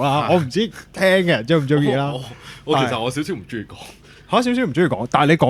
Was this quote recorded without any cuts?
yes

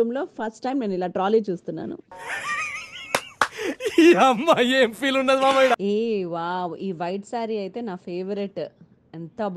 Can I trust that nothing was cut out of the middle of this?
no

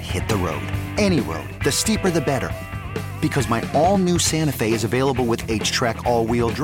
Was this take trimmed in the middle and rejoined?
no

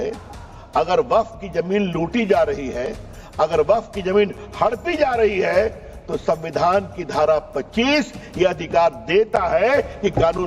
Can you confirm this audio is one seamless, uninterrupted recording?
yes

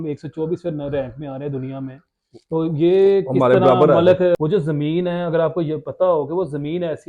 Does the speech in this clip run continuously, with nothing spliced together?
no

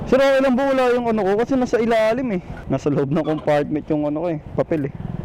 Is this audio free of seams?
no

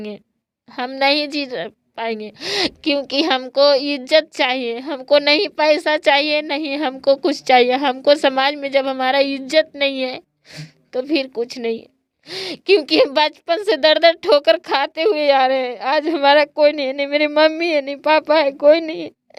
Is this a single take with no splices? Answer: yes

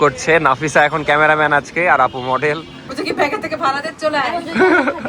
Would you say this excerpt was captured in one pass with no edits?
no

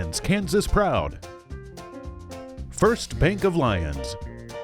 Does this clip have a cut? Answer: yes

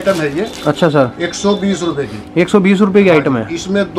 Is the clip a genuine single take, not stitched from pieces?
yes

